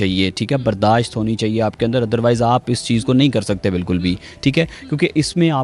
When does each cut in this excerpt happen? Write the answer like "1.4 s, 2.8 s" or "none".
none